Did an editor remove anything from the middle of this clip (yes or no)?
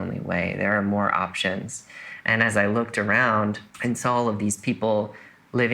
yes